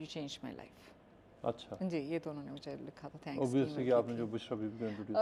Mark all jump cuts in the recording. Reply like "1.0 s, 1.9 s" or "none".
none